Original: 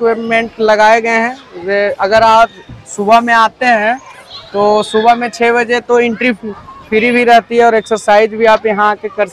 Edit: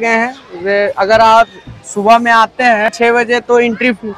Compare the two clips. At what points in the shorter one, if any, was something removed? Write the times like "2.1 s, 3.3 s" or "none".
2.9 s